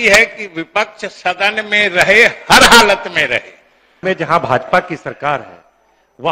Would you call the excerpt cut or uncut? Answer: cut